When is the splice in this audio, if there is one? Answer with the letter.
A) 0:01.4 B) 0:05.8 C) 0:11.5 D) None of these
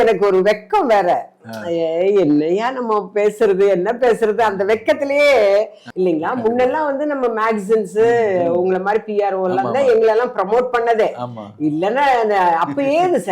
B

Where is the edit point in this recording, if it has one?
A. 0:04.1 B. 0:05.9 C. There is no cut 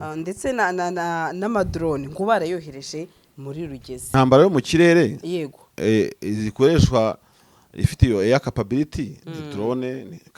A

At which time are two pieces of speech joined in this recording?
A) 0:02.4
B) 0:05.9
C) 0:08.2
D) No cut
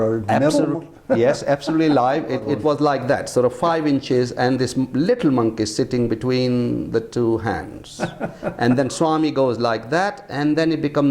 A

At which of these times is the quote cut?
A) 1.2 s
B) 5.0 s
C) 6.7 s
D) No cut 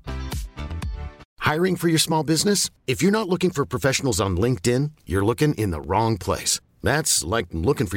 A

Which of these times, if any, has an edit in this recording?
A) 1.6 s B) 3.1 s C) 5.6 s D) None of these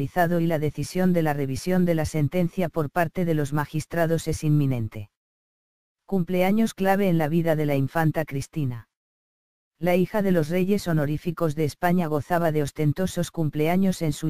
B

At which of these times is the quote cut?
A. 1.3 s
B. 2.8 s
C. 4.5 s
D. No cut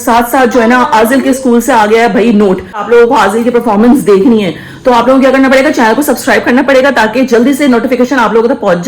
B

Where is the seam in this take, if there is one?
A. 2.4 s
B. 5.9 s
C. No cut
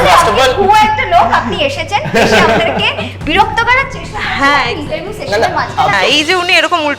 B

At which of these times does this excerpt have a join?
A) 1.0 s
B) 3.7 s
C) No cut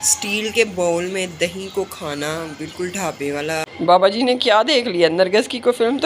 B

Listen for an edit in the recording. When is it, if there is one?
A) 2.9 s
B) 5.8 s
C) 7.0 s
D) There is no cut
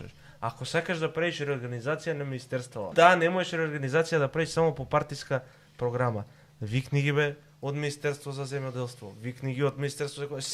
A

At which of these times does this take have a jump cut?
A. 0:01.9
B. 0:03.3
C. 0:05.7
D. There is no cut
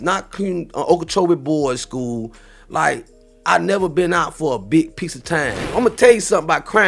C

